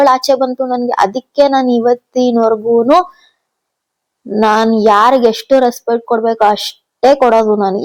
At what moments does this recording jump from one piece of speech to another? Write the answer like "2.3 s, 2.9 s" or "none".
none